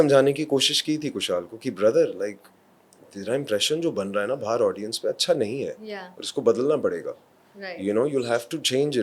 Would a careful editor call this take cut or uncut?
uncut